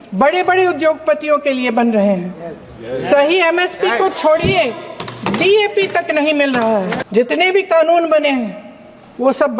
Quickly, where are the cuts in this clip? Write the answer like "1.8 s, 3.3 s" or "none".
7.0 s